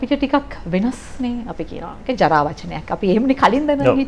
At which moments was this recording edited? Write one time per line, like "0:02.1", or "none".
none